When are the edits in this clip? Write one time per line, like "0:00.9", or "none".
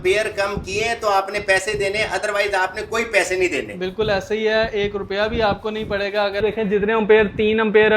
0:06.4